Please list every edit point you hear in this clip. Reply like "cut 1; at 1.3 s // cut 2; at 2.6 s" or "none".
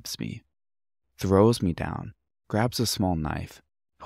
none